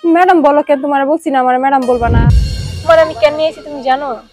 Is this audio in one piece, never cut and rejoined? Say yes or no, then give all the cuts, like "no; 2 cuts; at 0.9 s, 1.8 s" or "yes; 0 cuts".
no; 1 cut; at 2.3 s